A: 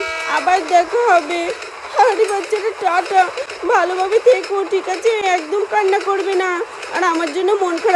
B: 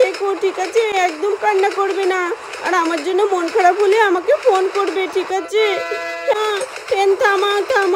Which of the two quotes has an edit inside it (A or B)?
B